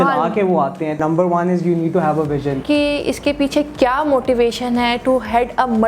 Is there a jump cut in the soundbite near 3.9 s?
no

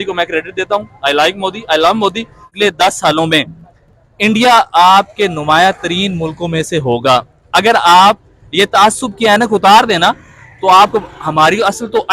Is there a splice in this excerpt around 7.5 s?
no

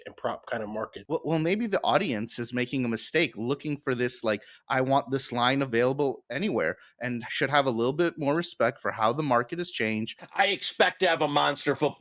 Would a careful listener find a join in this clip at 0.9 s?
yes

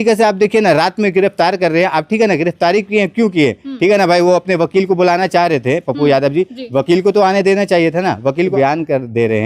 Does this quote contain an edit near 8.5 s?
yes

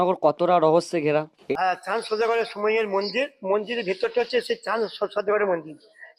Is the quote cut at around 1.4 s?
yes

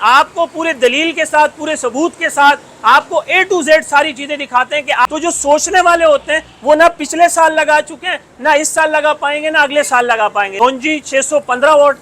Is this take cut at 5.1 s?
yes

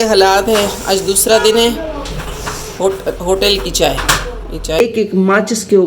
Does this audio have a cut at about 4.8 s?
yes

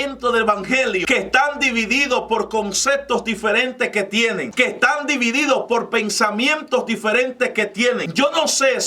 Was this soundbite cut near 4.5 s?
yes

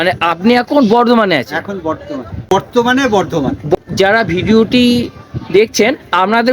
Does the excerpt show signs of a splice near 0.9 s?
no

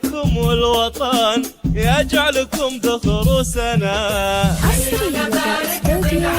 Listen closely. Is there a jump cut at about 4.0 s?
yes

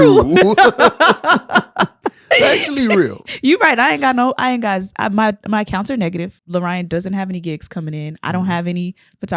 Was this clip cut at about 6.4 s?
yes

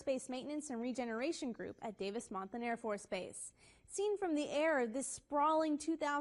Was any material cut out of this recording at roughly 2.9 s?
no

